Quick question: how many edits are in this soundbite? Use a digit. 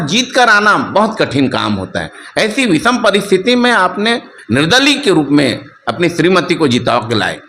1